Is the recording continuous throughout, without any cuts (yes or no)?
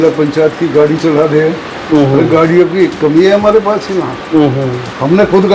yes